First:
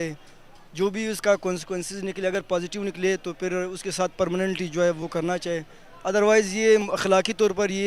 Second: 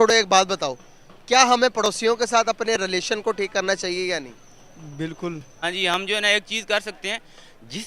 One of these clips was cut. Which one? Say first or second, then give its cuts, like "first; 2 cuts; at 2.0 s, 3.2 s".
second; 1 cut; at 5.6 s